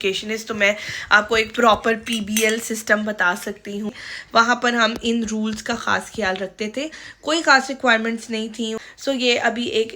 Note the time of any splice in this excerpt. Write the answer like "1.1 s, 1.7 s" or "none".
3.9 s, 7.1 s, 8.8 s